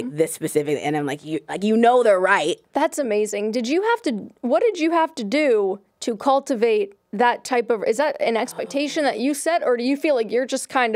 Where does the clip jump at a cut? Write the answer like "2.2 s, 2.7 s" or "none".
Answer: 2.6 s